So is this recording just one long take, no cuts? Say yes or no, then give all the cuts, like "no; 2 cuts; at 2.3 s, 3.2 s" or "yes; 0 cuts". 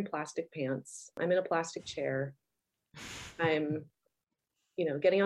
yes; 0 cuts